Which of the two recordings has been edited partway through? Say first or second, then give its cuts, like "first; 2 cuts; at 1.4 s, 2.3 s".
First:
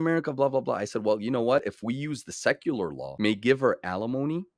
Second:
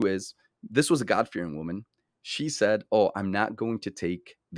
first; 1 cut; at 3.0 s